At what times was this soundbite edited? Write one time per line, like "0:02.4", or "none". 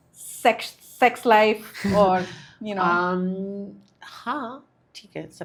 none